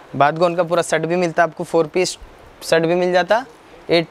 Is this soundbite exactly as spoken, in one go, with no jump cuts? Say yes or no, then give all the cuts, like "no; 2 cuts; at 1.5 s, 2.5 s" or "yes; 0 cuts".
yes; 0 cuts